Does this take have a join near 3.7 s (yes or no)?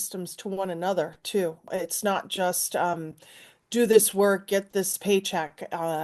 no